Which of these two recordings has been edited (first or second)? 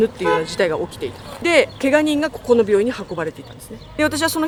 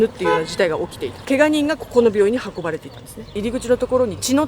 second